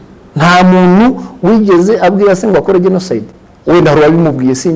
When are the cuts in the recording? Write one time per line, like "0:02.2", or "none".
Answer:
none